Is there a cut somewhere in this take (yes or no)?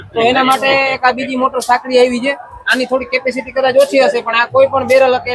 no